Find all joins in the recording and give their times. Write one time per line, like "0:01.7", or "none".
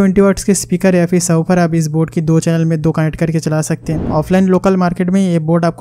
0:04.1